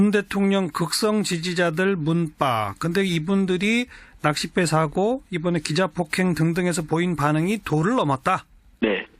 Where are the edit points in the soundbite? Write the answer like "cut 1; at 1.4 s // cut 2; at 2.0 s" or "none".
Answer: cut 1; at 7.9 s